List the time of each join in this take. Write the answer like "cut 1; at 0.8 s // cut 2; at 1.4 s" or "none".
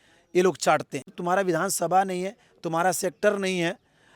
cut 1; at 1.2 s